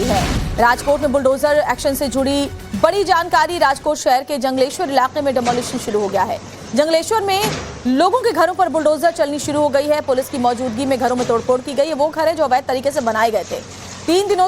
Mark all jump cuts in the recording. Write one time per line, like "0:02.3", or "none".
0:03.2